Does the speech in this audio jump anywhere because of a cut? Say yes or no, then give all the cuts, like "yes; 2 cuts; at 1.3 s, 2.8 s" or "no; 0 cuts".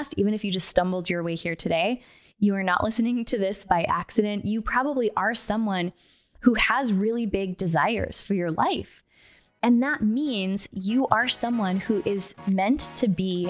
no; 0 cuts